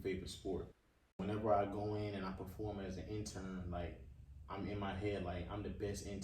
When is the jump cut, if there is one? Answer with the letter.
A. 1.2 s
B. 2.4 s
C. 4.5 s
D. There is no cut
A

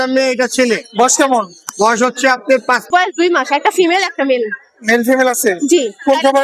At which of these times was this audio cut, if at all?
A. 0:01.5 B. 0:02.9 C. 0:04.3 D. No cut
B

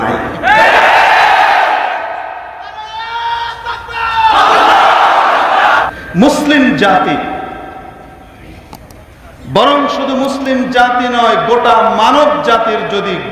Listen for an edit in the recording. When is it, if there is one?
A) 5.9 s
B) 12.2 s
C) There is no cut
A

